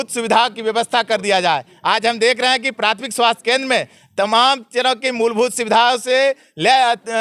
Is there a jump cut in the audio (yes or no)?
no